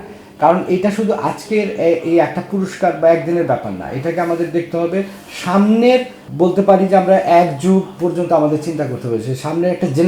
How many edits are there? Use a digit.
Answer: 1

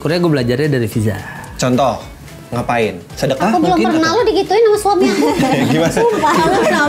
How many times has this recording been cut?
0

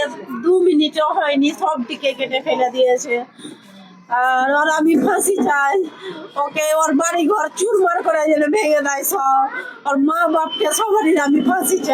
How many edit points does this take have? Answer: 1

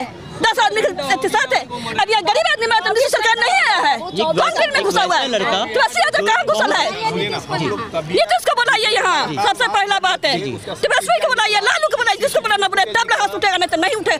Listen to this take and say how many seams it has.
0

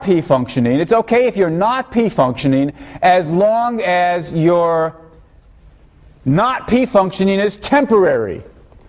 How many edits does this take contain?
1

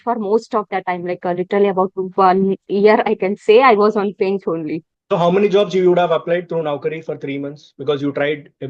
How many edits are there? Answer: 1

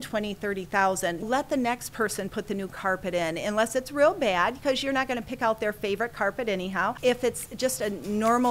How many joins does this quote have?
2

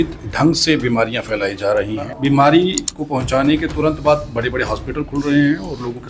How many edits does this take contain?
1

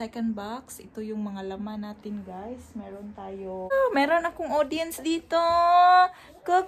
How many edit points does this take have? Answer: 1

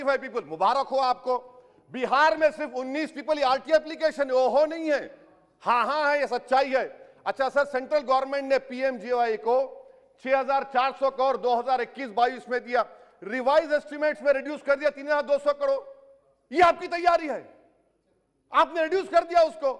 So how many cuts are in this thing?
0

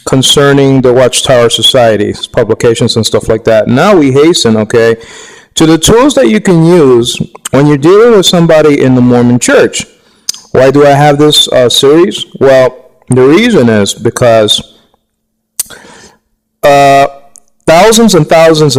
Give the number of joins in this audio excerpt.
0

